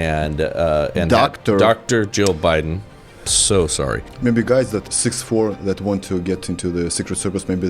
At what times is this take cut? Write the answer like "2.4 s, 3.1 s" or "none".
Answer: 4.1 s, 4.8 s